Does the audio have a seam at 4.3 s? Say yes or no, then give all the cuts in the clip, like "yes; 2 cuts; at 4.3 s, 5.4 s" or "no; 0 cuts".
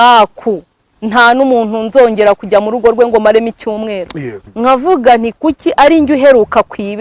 yes; 1 cut; at 4.3 s